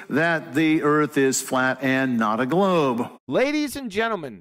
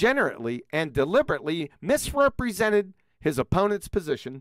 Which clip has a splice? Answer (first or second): first